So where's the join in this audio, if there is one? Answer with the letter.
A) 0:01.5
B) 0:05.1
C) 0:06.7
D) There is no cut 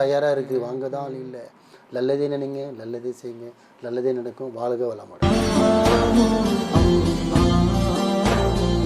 B